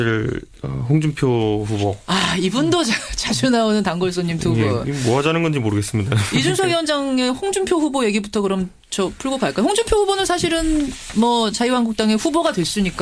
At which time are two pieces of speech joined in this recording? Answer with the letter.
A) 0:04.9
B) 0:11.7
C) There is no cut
B